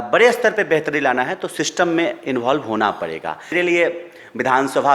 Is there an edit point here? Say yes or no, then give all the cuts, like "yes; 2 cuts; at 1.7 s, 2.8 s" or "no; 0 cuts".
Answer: yes; 1 cut; at 3.5 s